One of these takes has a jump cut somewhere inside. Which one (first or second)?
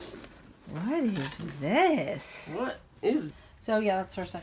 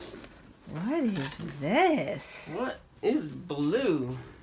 first